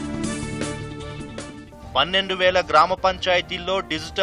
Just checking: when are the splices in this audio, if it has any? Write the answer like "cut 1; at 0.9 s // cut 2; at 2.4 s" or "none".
cut 1; at 1.1 s